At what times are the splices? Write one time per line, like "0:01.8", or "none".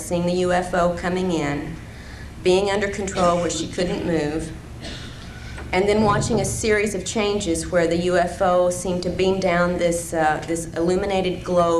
0:02.3